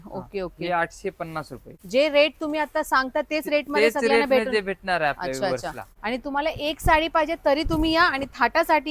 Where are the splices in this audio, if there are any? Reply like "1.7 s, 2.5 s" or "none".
1.7 s, 5.9 s